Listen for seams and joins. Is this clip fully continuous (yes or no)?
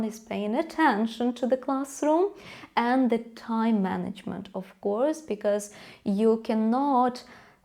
yes